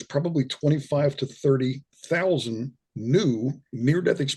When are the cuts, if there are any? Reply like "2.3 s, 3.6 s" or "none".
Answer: none